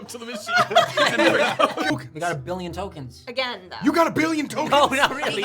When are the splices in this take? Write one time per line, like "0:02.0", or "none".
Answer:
0:01.9